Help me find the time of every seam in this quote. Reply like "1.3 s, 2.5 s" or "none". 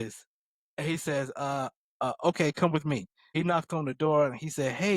3.2 s